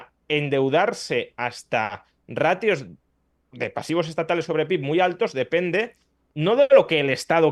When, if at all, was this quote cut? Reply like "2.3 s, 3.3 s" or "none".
none